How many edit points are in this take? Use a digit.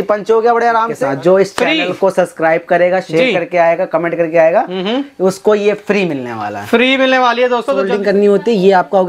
2